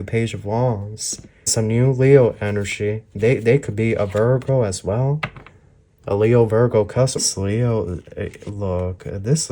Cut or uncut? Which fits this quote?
cut